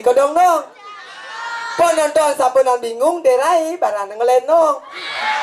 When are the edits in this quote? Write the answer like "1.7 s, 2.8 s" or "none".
none